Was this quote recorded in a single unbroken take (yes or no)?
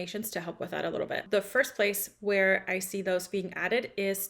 no